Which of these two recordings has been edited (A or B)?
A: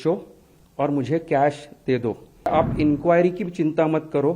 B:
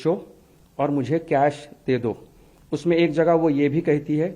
A